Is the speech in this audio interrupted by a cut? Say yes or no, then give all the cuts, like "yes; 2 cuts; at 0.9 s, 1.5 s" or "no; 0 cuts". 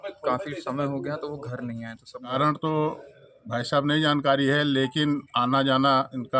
yes; 1 cut; at 2.3 s